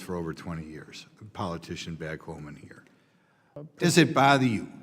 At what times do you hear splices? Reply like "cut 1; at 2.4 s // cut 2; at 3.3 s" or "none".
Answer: cut 1; at 3.7 s